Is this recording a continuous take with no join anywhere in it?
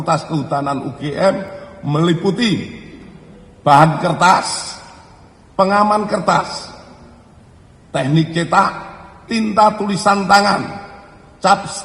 no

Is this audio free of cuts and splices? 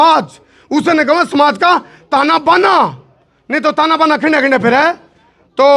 yes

